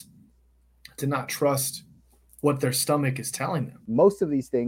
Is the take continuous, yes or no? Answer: no